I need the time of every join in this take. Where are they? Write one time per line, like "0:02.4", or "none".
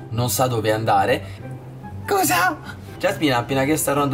0:01.4
0:02.9